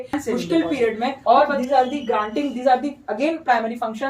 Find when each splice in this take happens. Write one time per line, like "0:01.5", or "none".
0:01.2